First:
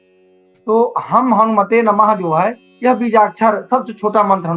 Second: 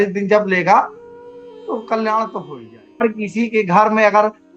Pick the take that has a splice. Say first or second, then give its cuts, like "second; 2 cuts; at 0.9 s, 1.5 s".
second; 1 cut; at 3.0 s